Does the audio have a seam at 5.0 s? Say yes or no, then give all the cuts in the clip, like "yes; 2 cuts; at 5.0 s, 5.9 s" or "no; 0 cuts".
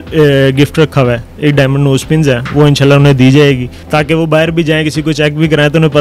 no; 2 cuts; at 1.3 s, 3.7 s